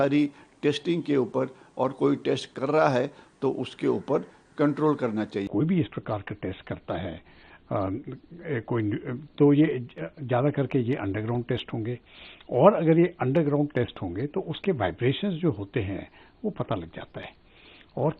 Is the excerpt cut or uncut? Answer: cut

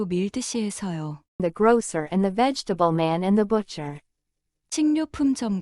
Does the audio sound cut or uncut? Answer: cut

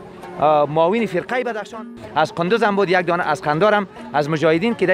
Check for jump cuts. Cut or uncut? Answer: cut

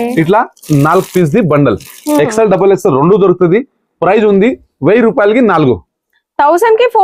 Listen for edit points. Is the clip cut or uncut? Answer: uncut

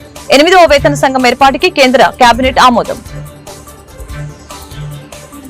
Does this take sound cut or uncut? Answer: cut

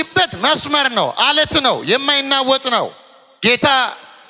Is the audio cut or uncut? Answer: uncut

